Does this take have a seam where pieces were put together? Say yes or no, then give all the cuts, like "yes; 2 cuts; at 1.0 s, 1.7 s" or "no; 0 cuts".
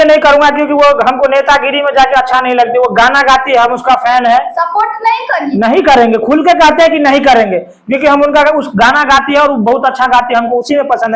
no; 0 cuts